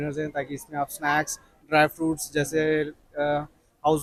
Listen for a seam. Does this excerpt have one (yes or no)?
no